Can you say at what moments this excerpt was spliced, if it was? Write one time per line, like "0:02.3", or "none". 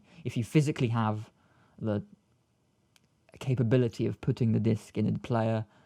none